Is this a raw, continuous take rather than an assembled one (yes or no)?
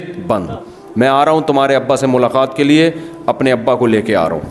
yes